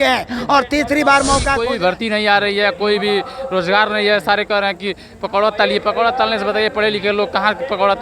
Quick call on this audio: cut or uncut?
cut